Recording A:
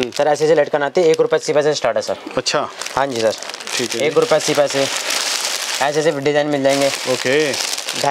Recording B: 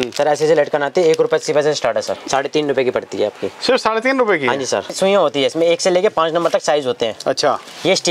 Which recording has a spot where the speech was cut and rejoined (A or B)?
B